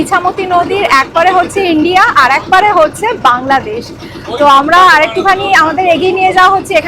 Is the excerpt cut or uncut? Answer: uncut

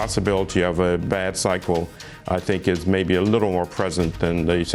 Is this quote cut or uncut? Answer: uncut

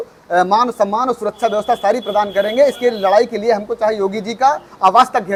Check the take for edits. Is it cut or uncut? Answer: uncut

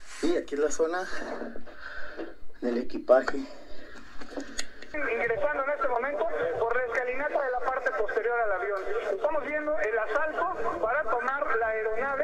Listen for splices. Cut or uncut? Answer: cut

